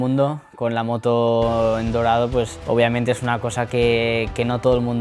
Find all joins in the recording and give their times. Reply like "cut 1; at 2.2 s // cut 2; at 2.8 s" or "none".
cut 1; at 2.6 s